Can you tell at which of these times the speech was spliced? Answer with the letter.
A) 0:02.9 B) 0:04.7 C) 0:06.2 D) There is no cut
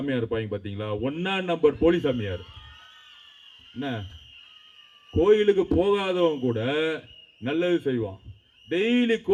D